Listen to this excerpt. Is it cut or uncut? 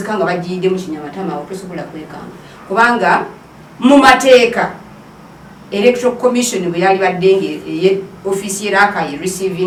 uncut